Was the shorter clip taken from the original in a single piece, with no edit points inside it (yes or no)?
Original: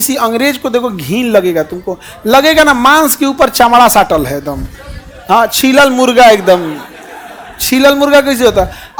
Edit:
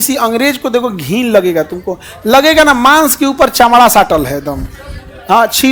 yes